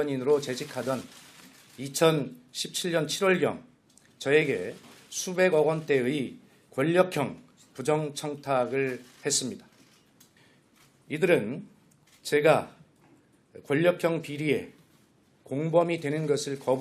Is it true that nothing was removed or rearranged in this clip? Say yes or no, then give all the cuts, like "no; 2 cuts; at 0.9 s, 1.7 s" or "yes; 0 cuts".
no; 1 cut; at 11.8 s